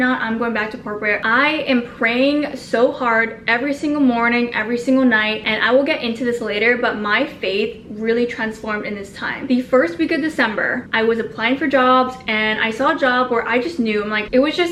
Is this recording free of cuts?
yes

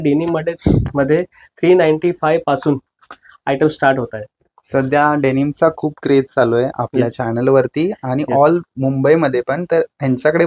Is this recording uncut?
yes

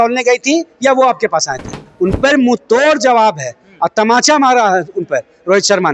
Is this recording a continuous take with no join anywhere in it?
no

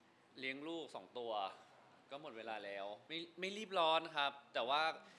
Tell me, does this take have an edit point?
yes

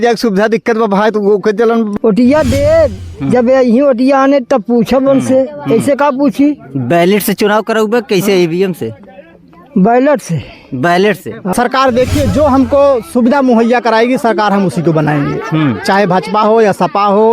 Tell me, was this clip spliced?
yes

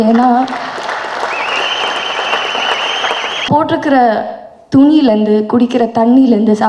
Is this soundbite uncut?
no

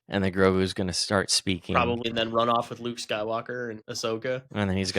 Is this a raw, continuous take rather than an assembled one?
no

